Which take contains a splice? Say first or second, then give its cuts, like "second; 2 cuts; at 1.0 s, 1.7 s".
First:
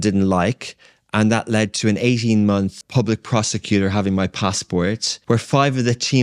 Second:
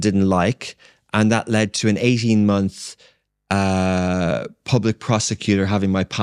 first; 2 cuts; at 2.8 s, 5.1 s